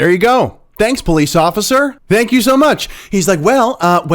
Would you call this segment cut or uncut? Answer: cut